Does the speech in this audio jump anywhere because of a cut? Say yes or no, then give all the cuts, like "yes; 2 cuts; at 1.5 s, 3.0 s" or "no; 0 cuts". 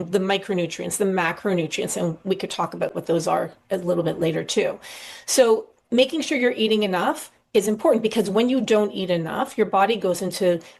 no; 0 cuts